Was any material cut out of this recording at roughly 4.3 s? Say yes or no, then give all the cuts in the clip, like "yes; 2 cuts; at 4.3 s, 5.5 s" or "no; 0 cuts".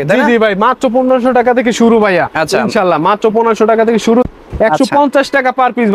yes; 1 cut; at 4.3 s